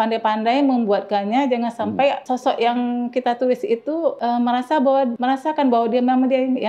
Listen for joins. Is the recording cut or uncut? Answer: cut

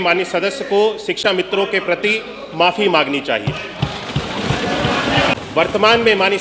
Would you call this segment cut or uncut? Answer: cut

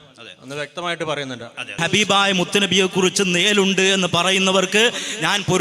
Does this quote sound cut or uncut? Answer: cut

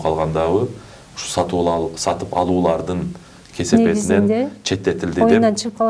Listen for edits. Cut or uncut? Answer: uncut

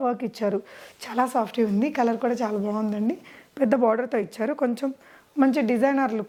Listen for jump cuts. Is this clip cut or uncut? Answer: uncut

